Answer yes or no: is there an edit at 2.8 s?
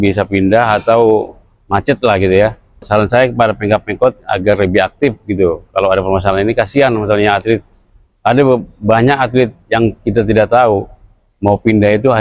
no